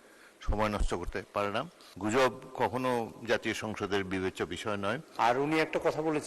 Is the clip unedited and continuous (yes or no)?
no